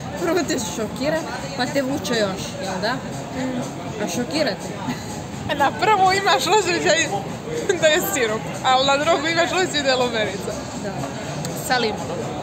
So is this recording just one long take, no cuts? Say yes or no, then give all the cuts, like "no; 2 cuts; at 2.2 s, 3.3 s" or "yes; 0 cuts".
yes; 0 cuts